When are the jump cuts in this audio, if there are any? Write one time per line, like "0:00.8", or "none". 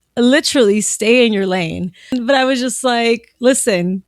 0:02.1